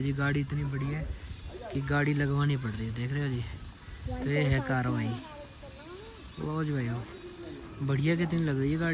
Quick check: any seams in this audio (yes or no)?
no